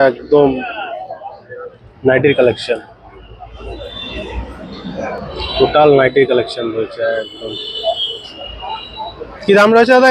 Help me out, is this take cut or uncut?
uncut